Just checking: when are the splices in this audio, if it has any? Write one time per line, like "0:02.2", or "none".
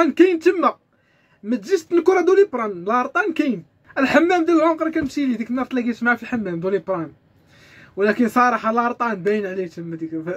0:03.8